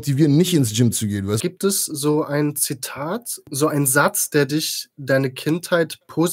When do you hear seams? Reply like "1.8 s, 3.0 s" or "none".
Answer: 1.4 s, 3.5 s